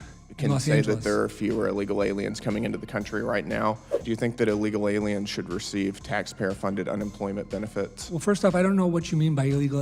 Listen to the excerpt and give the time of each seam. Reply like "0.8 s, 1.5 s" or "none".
4.0 s